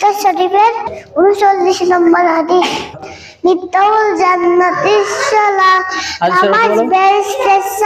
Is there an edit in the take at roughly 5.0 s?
no; 0 cuts

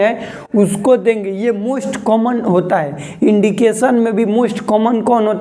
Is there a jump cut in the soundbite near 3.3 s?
no; 0 cuts

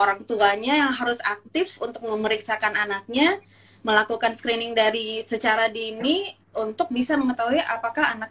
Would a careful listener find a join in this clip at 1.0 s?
no; 0 cuts

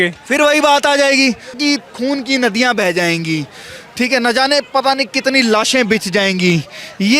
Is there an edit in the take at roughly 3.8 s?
no; 1 cut; at 1.6 s

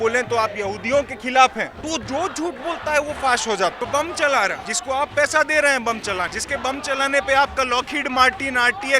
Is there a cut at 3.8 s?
yes; 4 cuts; at 1.8 s, 3.8 s, 4.7 s, 6.4 s

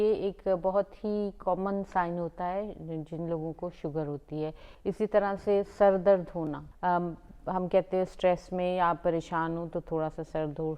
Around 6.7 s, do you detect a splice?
yes; 2 cuts; at 4.7 s, 6.7 s

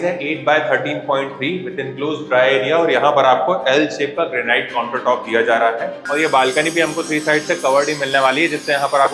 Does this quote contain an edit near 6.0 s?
yes; 1 cut; at 6.0 s

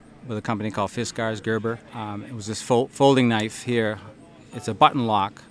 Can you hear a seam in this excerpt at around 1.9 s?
yes; 1 cut; at 1.9 s

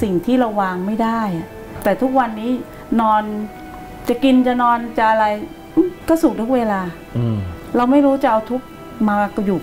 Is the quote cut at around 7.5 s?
yes; 3 cuts; at 1.7 s, 6.0 s, 7.5 s

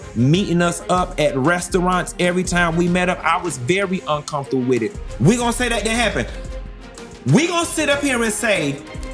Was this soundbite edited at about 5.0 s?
yes; 1 cut; at 5.0 s

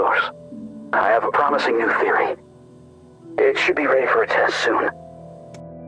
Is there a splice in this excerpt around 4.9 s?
yes; 1 cut; at 4.9 s

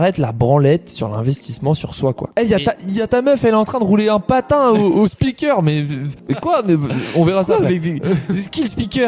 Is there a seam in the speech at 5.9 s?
no; 1 cut; at 2.3 s

